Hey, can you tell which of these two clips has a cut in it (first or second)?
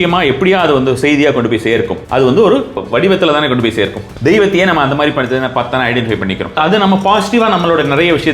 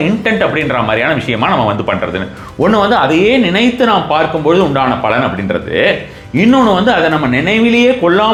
first